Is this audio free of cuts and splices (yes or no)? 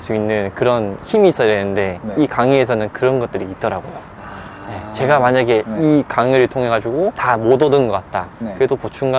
yes